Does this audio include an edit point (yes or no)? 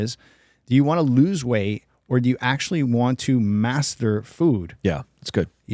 no